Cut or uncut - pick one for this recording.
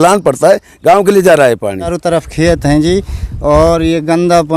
cut